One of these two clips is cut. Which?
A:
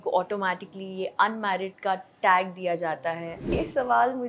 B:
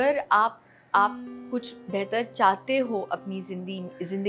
A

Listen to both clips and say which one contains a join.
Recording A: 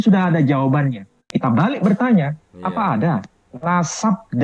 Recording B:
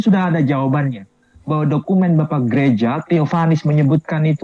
A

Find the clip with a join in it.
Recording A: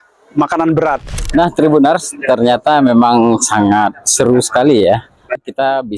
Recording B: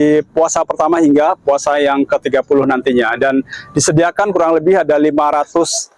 A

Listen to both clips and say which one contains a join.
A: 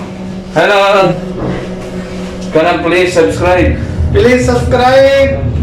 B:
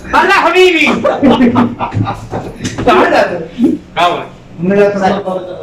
A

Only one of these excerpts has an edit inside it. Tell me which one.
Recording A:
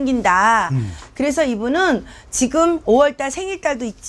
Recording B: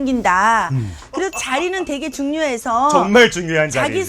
B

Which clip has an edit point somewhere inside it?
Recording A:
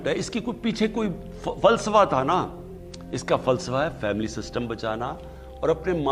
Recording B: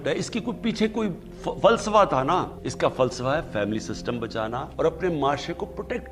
B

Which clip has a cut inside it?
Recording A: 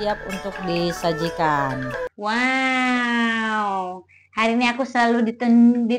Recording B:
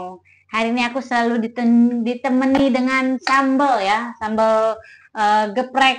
A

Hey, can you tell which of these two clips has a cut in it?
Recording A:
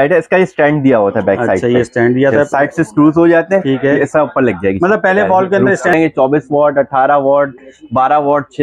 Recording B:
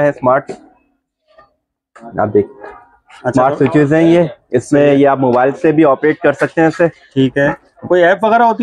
A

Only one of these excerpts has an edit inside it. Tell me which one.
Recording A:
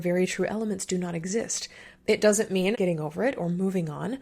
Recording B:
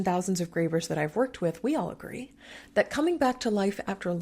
A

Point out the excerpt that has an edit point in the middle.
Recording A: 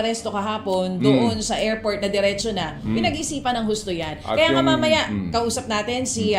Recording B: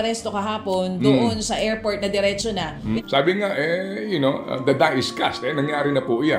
B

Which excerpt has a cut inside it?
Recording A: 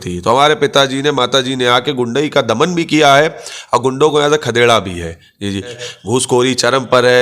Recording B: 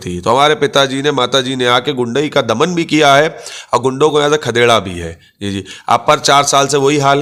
A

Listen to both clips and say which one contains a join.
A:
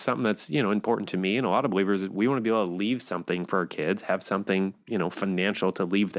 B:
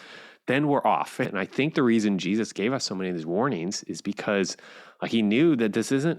B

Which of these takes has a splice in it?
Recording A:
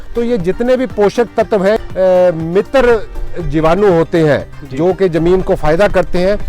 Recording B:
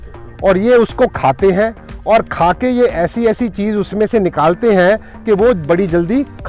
A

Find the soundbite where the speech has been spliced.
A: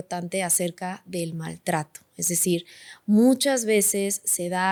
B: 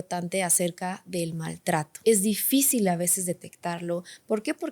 B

